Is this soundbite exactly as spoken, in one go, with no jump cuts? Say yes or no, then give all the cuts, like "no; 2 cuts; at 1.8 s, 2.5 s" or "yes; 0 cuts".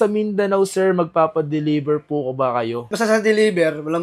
yes; 0 cuts